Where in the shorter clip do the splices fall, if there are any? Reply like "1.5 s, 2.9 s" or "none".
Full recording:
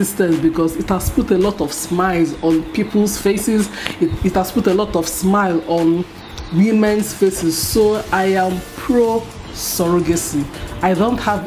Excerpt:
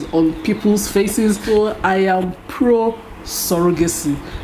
1.4 s

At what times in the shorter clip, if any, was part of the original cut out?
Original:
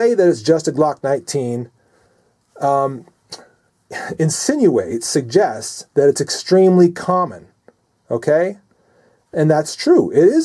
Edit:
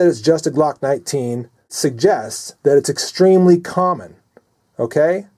1.7 s

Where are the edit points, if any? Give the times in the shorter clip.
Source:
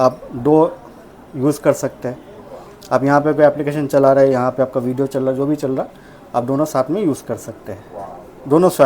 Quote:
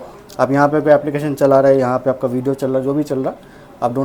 none

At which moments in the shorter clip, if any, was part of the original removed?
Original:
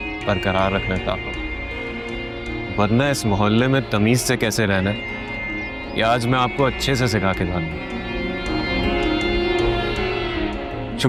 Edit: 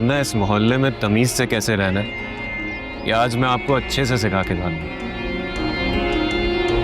none

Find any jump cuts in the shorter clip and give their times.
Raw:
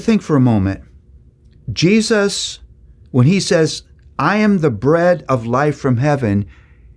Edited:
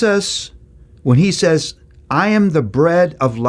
none

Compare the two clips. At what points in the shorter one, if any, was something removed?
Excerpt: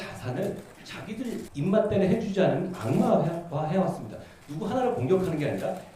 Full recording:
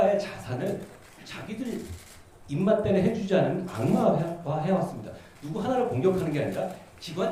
1.1 s

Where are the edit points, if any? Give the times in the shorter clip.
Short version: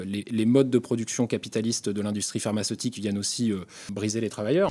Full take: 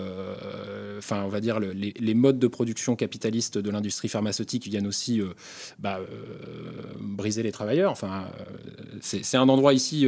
3.8 s

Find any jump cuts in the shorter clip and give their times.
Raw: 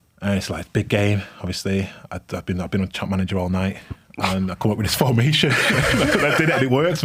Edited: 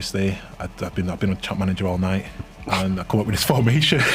none

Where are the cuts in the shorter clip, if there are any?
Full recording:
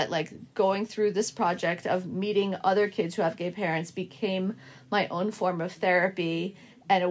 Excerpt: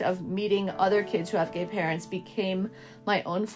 none

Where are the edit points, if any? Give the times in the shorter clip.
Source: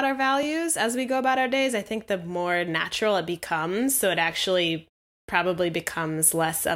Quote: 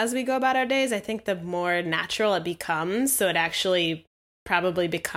none

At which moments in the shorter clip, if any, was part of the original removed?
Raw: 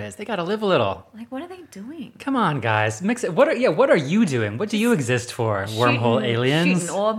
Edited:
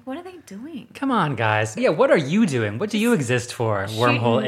1.8 s

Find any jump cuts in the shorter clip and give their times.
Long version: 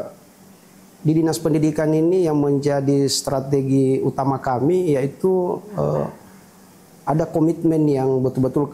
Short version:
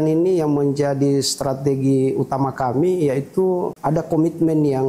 3.7 s

